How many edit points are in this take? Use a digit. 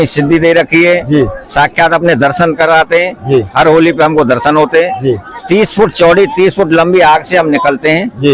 1